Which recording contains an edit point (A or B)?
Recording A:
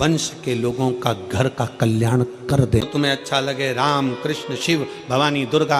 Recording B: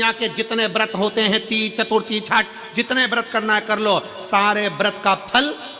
A